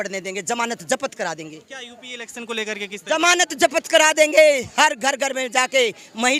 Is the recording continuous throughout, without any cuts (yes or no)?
yes